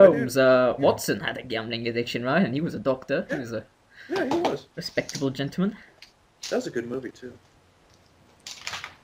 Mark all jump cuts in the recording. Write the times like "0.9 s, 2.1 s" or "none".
none